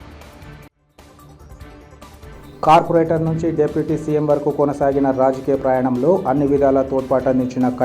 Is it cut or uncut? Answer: uncut